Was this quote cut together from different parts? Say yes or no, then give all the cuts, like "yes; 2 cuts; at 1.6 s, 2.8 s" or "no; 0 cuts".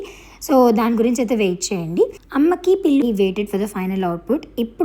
yes; 1 cut; at 3.0 s